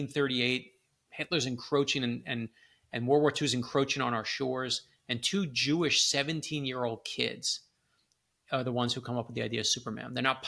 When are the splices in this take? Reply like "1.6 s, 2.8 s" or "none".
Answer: none